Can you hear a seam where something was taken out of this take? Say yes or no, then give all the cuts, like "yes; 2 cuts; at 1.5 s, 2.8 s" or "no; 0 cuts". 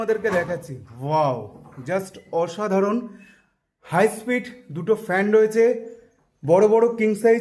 no; 0 cuts